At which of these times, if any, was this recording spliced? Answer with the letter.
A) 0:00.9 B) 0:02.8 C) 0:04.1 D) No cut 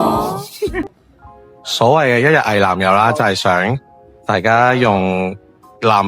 A